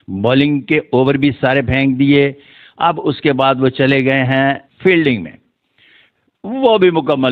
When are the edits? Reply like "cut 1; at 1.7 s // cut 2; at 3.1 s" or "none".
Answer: cut 1; at 4.7 s